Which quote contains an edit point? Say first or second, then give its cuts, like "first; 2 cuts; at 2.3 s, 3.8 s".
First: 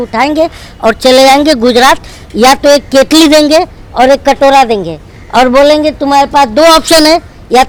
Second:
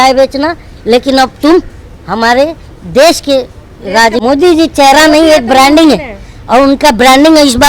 second; 1 cut; at 4.2 s